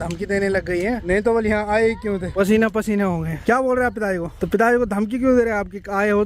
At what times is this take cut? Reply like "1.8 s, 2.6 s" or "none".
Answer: 1.0 s, 2.3 s, 3.4 s, 4.3 s

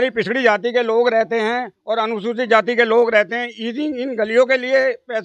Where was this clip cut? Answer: none

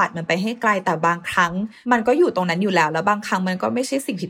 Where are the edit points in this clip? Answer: 1.7 s

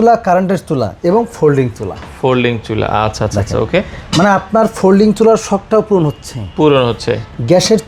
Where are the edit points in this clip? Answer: none

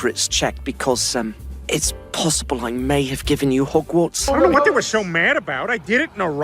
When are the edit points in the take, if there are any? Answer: 4.4 s

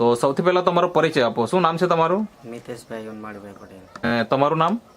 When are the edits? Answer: 4.1 s

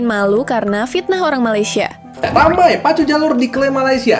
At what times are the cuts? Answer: 2.2 s

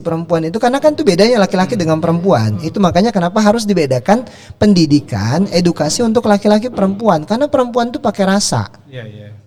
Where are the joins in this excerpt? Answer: none

